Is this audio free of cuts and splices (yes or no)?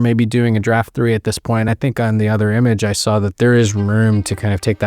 no